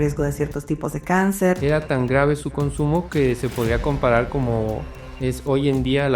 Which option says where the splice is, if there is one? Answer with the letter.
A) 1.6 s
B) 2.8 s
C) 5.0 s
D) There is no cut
A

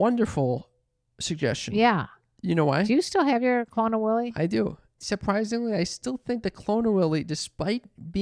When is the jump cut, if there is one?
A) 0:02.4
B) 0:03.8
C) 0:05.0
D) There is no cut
C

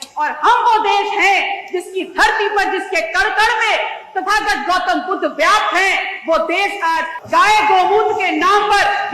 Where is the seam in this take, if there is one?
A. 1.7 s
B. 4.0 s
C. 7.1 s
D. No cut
C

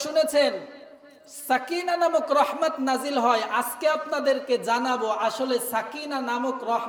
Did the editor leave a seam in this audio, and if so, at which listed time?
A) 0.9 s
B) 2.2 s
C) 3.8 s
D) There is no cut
D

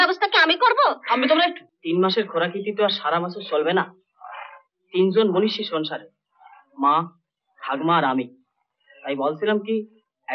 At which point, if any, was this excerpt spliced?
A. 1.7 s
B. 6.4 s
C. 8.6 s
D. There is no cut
A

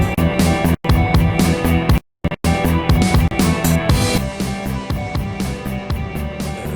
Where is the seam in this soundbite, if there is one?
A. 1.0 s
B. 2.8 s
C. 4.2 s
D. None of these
C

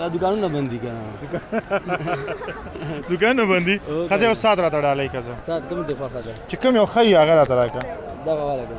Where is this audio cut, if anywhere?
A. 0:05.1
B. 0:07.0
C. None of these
C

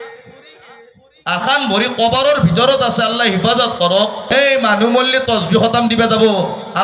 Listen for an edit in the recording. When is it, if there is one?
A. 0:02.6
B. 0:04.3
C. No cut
B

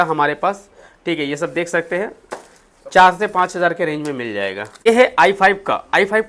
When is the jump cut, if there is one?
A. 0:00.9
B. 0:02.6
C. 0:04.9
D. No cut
C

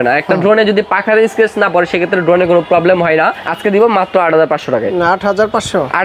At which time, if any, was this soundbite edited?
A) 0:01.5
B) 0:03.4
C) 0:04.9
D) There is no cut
B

